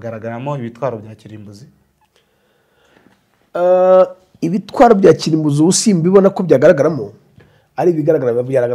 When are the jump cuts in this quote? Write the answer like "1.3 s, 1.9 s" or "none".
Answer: none